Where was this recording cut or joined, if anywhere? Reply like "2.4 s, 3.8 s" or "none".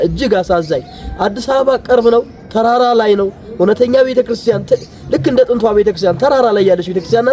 none